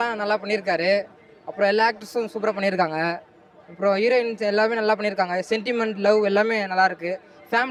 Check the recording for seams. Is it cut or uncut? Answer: uncut